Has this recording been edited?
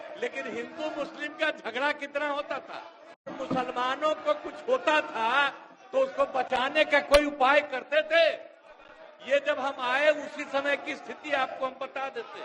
yes; 1 cut; at 3.3 s

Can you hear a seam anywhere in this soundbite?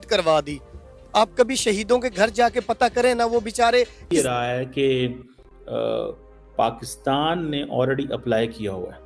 yes; 1 cut; at 4.0 s

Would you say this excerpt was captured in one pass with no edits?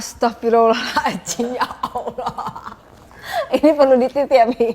yes; 0 cuts

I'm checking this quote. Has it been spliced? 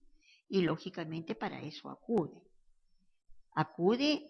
yes; 1 cut; at 2.5 s

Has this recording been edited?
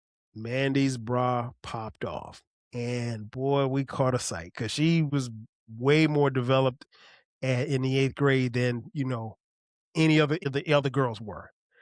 yes; 2 cuts; at 5.1 s, 10.4 s

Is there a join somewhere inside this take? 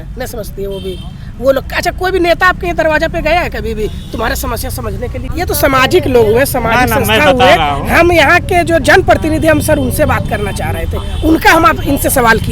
yes; 1 cut; at 5.2 s

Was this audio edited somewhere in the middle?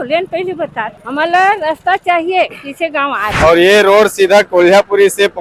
yes; 2 cuts; at 1.0 s, 3.3 s

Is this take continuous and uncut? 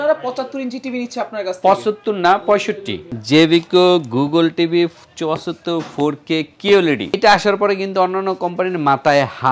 no; 2 cuts; at 2.9 s, 7.2 s

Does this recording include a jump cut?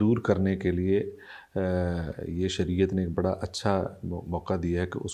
no; 0 cuts

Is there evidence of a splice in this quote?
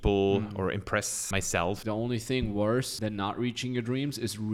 yes; 2 cuts; at 1.4 s, 2.9 s

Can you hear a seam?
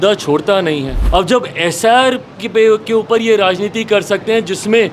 yes; 1 cut; at 0.9 s

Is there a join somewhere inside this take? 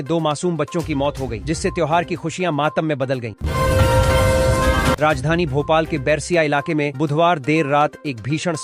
yes; 2 cuts; at 3.3 s, 5.0 s

